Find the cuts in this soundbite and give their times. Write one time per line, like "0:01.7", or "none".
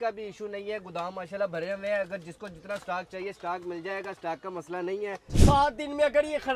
0:05.3